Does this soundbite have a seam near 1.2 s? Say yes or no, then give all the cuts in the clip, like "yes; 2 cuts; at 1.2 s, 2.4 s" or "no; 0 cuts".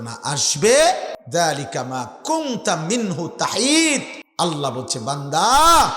yes; 2 cuts; at 1.2 s, 4.2 s